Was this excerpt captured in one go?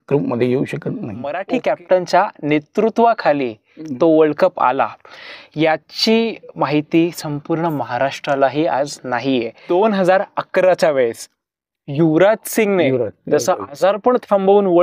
no; 2 cuts; at 1.4 s, 9.6 s

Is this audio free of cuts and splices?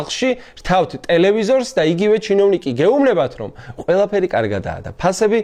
yes; 0 cuts

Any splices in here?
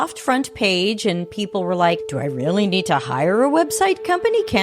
yes; 1 cut; at 2.1 s

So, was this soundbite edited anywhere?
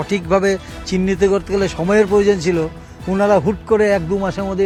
no; 0 cuts

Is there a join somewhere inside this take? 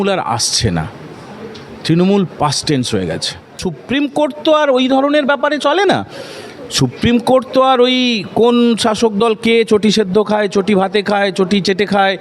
yes; 1 cut; at 3.7 s

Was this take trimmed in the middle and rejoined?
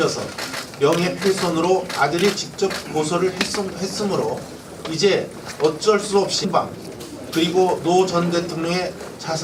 no; 0 cuts

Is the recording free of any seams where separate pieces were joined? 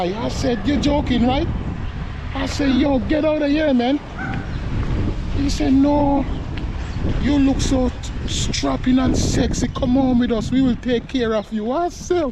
yes; 0 cuts

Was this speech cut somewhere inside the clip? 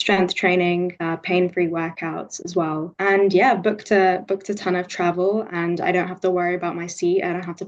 yes; 2 cuts; at 1.0 s, 2.9 s

